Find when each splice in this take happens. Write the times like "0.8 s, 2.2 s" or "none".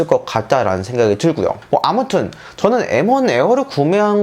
1.6 s